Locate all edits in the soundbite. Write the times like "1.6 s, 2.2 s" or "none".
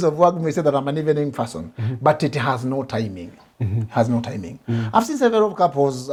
none